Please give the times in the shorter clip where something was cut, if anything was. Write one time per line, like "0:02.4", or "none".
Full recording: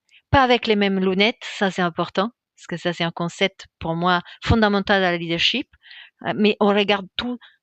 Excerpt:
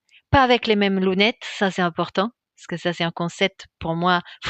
none